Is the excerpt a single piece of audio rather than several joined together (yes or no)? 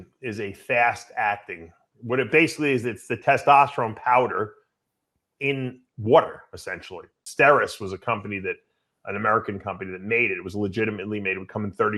no